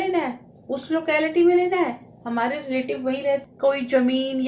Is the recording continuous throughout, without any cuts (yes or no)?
no